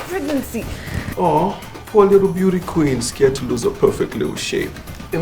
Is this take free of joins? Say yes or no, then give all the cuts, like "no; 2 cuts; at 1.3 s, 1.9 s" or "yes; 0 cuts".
no; 1 cut; at 1.1 s